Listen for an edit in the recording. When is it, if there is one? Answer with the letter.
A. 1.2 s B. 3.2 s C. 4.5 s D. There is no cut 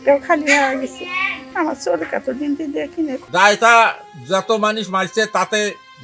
B